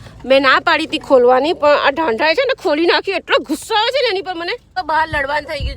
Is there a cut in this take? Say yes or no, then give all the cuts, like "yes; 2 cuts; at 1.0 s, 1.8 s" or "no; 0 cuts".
yes; 1 cut; at 4.7 s